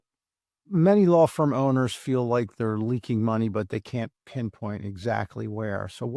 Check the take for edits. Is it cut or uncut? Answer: uncut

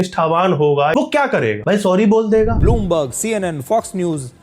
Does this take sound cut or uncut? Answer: cut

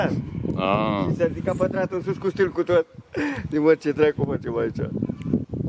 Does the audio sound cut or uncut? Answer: uncut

